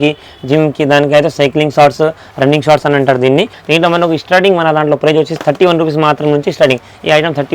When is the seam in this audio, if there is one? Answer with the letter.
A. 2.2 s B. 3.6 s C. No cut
B